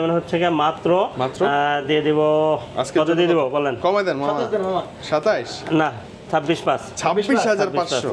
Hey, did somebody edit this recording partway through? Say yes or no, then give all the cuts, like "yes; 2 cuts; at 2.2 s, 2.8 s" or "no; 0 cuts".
no; 0 cuts